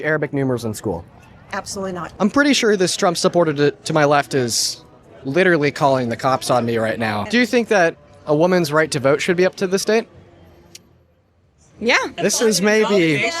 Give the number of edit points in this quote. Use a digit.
3